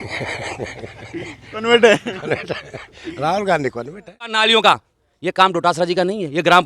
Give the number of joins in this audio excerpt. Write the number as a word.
one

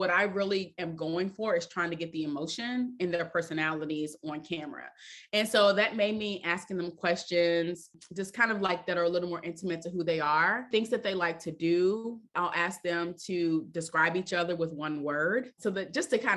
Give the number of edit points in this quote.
four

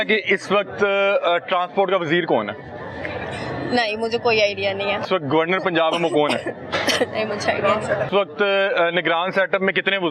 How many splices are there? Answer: two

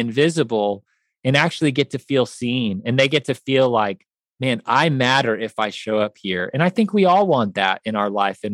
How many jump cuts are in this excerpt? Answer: zero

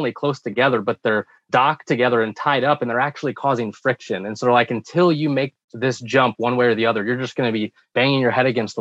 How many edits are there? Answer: two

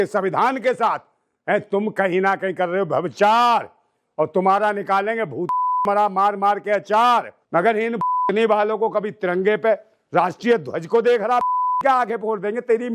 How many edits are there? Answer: one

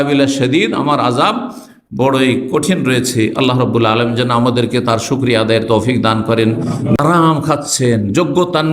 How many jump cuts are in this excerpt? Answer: one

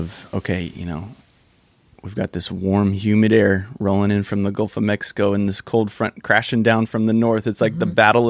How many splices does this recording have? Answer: zero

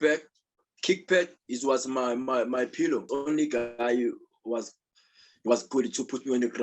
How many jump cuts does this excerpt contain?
one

